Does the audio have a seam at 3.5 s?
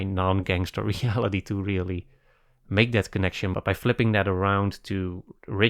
yes; 1 cut; at 3.5 s

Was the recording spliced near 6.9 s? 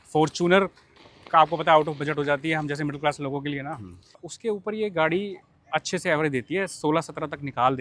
no; 1 cut; at 4.3 s

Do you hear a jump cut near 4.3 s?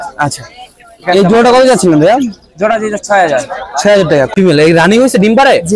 yes; 1 cut; at 4.3 s

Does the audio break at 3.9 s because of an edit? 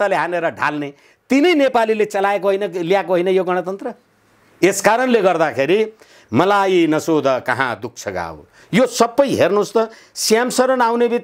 no; 0 cuts

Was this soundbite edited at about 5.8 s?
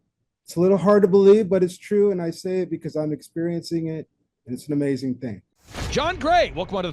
yes; 1 cut; at 5.8 s

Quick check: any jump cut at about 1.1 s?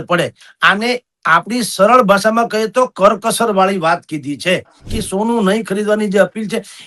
no; 1 cut; at 4.9 s

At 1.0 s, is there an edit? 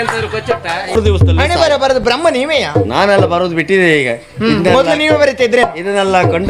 yes; 1 cut; at 1.0 s

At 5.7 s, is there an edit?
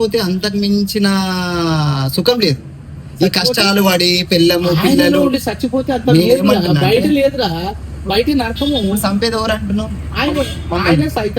no; 0 cuts

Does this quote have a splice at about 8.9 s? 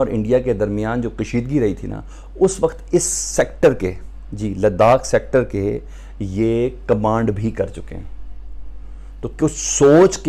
no; 0 cuts

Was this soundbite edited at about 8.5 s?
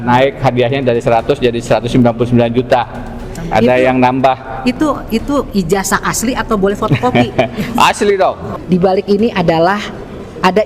yes; 1 cut; at 8.5 s

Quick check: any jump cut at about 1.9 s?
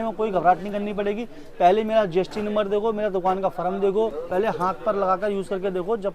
no; 1 cut; at 4.2 s

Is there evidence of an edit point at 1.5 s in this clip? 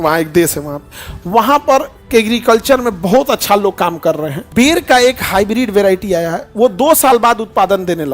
no; 1 cut; at 4.4 s

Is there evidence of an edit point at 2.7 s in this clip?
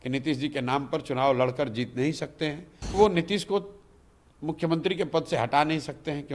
yes; 1 cut; at 2.7 s

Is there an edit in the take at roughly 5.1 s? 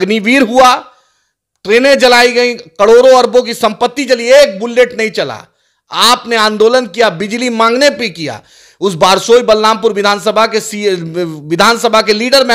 no; 0 cuts

